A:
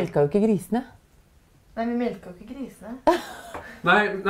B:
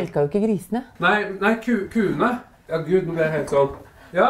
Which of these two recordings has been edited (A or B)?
B